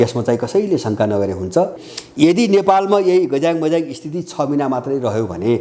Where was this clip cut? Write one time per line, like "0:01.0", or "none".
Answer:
0:01.9